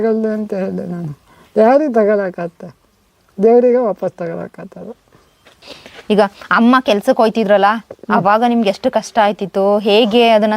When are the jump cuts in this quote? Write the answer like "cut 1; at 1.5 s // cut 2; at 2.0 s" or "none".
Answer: cut 1; at 6.0 s